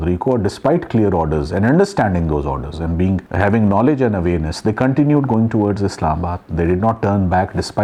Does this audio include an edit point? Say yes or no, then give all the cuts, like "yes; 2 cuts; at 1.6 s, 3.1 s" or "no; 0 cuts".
no; 0 cuts